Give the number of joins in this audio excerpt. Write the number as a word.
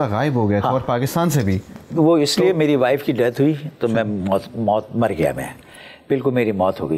zero